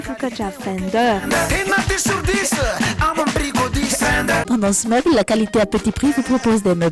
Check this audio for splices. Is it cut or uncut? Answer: cut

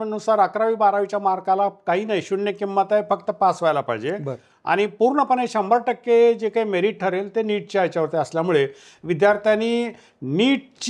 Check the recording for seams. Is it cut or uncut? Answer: uncut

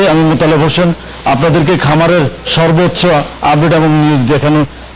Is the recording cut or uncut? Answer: uncut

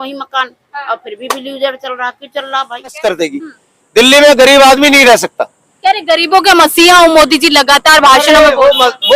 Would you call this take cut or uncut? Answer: cut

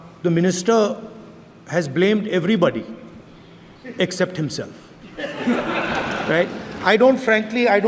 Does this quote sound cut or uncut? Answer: uncut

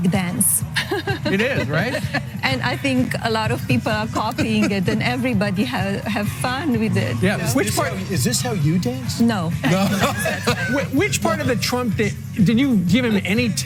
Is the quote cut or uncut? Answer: uncut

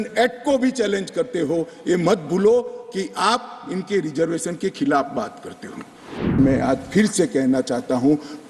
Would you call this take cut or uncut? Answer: cut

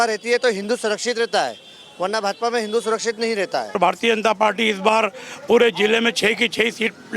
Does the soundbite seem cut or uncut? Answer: cut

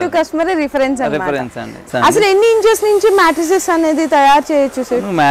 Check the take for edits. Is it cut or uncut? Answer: cut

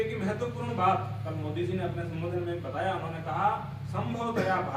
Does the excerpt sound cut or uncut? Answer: uncut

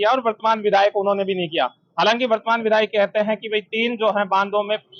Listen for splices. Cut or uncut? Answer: uncut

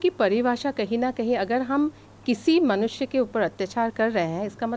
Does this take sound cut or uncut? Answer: uncut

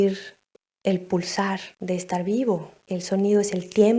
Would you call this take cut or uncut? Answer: cut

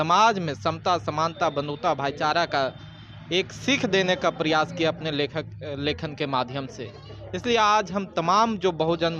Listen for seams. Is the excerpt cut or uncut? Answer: uncut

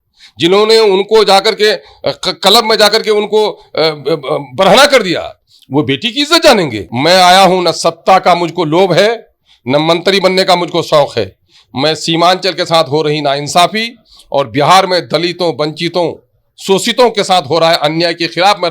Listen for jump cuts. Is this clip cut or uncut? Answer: cut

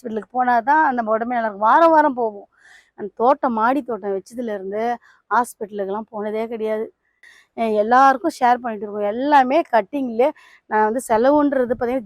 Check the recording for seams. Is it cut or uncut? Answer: cut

